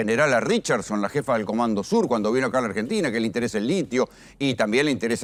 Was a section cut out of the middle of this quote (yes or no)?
no